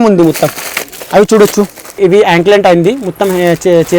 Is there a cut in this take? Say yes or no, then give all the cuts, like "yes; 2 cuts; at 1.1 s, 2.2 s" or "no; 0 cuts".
yes; 1 cut; at 2.0 s